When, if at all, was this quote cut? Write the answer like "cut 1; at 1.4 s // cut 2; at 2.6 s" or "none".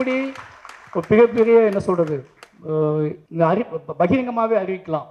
cut 1; at 3.2 s